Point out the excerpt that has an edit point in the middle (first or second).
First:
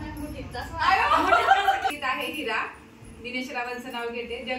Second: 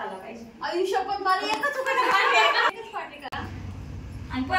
second